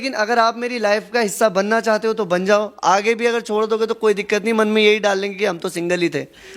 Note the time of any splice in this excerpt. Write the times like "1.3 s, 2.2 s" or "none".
none